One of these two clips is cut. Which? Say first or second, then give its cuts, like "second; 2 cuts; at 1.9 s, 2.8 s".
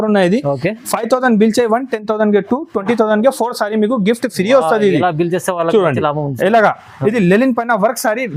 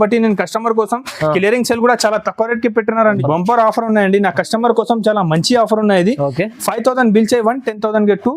second; 1 cut; at 3.2 s